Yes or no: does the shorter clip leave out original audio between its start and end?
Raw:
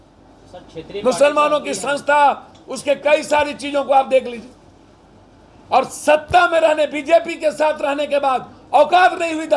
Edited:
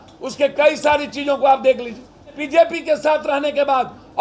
yes